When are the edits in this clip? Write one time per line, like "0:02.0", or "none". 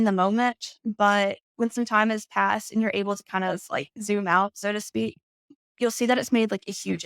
0:05.6